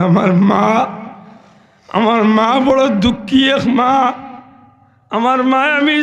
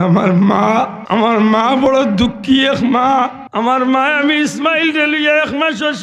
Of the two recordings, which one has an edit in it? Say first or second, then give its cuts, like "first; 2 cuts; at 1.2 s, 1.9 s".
second; 2 cuts; at 1.0 s, 3.4 s